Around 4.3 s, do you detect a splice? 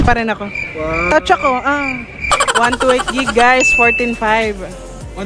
no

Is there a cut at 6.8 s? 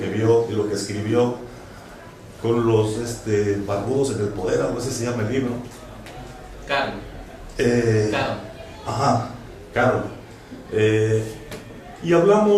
no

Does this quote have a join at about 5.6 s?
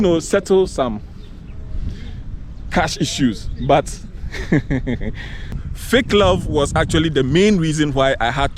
yes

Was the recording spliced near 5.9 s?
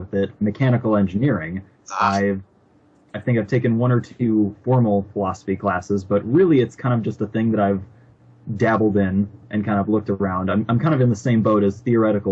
no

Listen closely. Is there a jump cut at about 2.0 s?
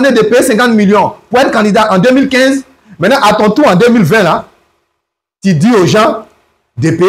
no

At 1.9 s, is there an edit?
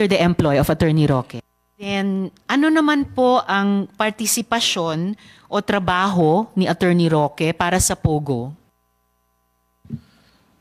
yes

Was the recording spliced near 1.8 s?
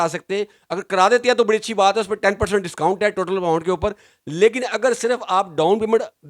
no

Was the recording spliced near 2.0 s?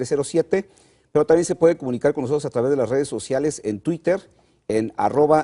yes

